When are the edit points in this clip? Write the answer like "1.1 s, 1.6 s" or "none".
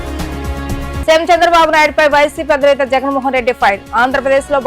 1.0 s